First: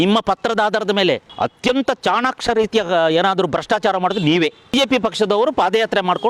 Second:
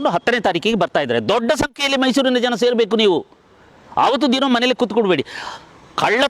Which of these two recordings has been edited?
first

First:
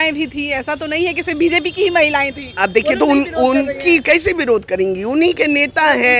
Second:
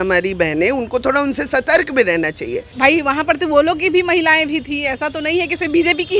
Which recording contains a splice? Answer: second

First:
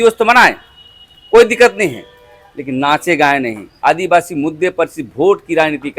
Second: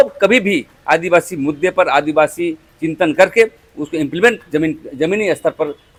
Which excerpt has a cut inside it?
first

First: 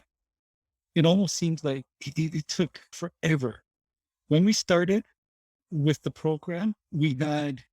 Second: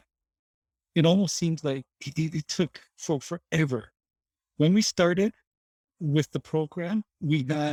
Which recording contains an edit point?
first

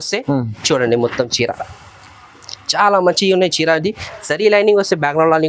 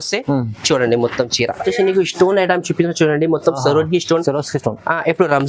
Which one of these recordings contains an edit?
second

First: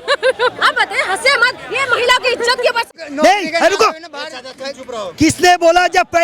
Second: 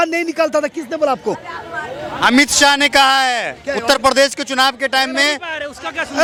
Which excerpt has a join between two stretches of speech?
first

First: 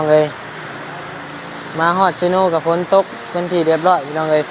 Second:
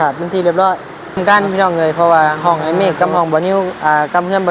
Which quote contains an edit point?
second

